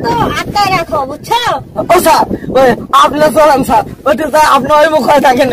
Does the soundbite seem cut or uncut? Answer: uncut